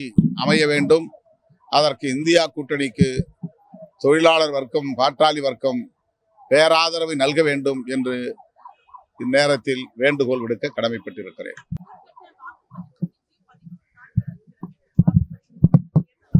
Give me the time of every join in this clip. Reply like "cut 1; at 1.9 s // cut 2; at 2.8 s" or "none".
none